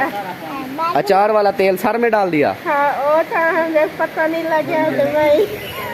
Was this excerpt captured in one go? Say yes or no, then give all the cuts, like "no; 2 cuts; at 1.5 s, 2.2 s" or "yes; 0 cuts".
yes; 0 cuts